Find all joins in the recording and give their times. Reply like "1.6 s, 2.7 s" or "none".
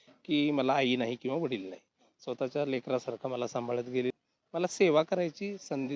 4.1 s